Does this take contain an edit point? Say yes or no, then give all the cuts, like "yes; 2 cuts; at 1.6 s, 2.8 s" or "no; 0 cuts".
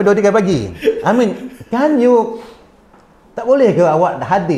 no; 0 cuts